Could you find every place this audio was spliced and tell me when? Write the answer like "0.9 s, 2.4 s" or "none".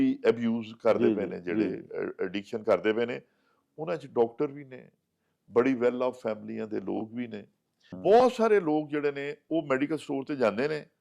7.9 s